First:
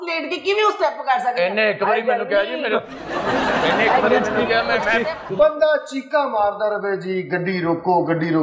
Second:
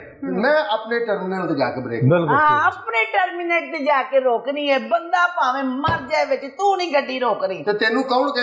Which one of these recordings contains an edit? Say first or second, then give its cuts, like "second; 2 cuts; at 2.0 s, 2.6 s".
first; 1 cut; at 5.2 s